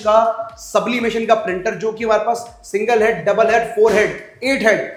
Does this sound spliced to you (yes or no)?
no